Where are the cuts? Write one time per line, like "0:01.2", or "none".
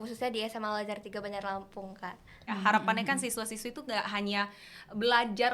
0:02.5